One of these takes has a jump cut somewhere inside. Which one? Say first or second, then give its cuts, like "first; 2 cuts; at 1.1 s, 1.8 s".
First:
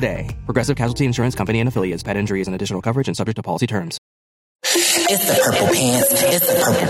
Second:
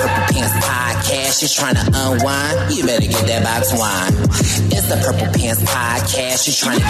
first; 1 cut; at 4.8 s